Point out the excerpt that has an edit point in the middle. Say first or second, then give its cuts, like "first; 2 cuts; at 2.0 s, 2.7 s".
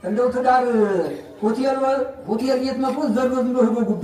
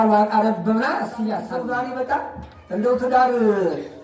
second; 1 cut; at 1.5 s